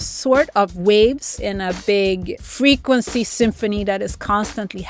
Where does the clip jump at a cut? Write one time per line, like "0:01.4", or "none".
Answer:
0:01.5
0:02.4